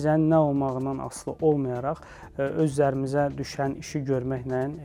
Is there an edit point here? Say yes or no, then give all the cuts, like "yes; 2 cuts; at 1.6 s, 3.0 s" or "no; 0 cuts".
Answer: no; 0 cuts